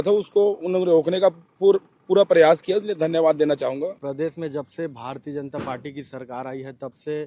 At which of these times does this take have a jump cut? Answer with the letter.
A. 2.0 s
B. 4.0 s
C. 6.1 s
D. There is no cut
B